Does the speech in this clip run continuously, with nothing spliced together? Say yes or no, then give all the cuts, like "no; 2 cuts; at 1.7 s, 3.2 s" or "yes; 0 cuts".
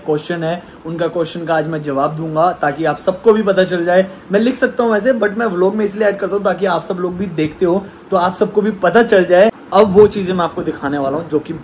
no; 1 cut; at 9.5 s